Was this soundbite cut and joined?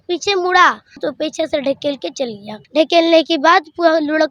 yes; 2 cuts; at 1.0 s, 2.6 s

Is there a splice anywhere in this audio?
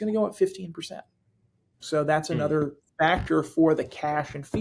no; 0 cuts

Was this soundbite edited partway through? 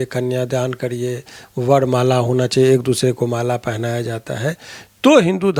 no; 0 cuts

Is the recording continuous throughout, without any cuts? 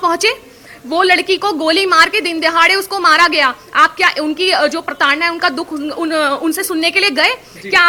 yes; 0 cuts

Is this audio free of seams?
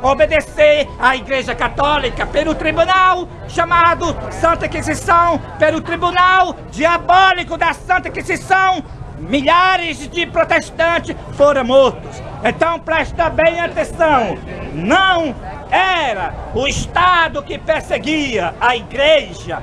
yes; 0 cuts

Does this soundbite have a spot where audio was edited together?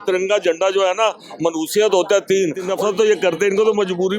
yes; 1 cut; at 2.7 s

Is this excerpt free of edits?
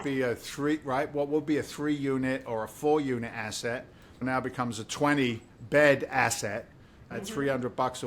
yes; 0 cuts

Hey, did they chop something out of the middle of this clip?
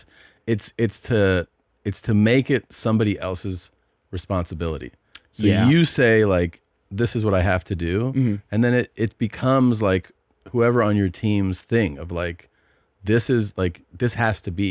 no; 0 cuts

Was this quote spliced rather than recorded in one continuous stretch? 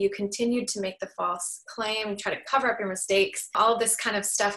yes; 1 cut; at 3.5 s

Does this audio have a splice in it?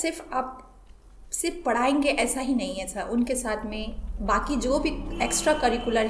no; 0 cuts

